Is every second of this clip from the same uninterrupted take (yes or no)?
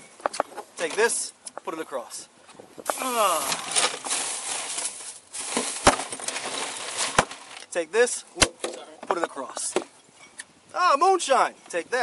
yes